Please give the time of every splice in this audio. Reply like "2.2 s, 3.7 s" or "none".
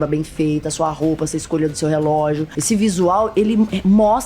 2.5 s